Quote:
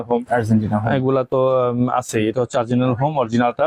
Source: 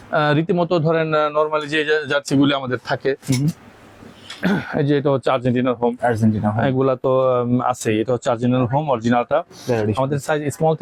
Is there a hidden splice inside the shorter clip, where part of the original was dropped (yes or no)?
no